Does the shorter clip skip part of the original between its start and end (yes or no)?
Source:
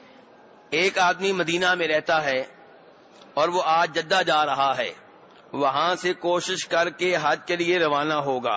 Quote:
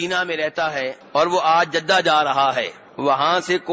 yes